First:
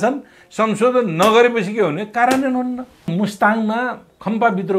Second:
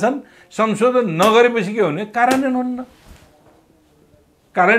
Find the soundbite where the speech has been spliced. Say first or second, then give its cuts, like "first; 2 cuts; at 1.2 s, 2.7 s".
first; 1 cut; at 3.1 s